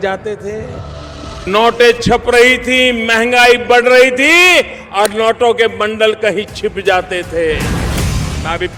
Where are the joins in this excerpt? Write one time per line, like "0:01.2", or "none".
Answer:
none